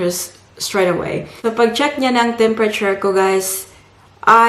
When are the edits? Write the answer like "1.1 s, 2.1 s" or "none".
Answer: 1.2 s